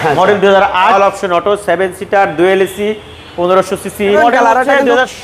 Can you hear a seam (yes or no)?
yes